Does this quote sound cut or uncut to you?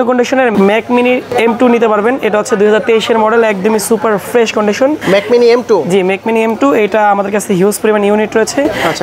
uncut